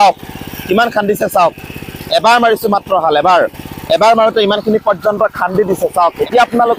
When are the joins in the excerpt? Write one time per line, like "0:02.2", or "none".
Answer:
none